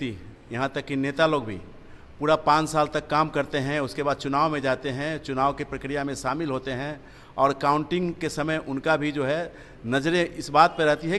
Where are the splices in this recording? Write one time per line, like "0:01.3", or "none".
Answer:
none